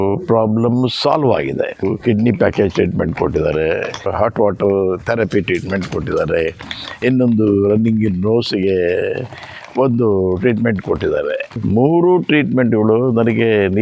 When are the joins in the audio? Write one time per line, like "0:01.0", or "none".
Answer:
0:01.8
0:04.1
0:11.6